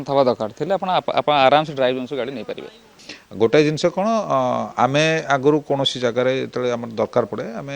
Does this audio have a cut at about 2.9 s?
yes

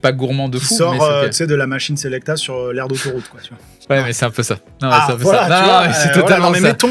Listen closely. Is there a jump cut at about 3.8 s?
no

